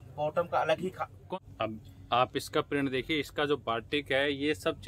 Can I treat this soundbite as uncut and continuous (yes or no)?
no